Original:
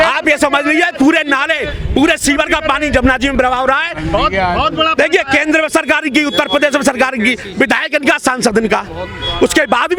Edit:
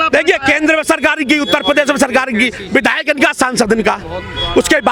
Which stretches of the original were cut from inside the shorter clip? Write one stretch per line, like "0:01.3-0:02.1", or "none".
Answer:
none